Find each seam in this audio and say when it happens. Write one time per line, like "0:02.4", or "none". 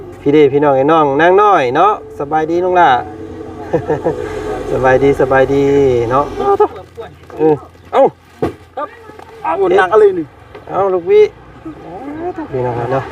0:06.4